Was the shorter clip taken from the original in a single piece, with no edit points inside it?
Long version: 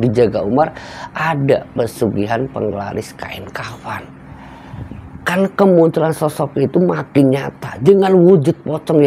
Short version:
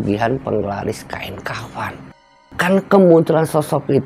no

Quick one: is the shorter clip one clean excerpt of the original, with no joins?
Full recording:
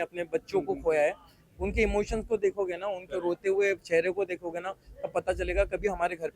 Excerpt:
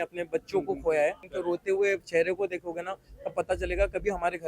no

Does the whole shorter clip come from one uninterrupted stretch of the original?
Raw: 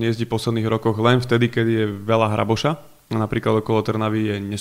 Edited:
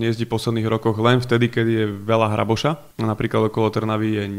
no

